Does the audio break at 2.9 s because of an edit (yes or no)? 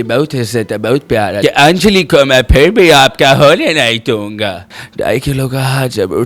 no